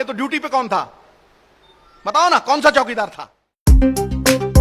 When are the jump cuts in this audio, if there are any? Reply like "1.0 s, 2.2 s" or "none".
3.4 s